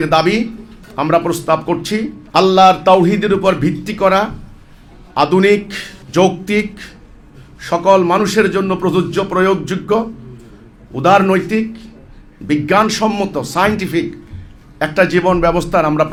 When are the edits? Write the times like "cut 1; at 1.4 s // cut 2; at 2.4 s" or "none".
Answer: none